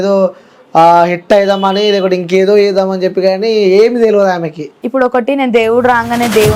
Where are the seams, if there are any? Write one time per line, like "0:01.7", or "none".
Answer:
0:04.7